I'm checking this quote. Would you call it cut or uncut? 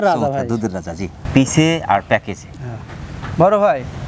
uncut